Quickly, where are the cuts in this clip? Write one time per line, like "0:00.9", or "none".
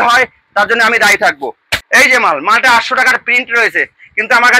0:01.7